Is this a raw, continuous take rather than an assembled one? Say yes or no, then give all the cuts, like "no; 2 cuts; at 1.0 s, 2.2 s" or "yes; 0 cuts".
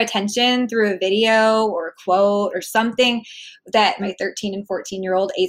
no; 1 cut; at 4.0 s